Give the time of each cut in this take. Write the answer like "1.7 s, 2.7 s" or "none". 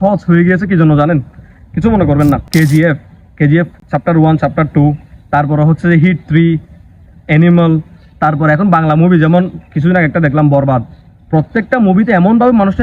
2.4 s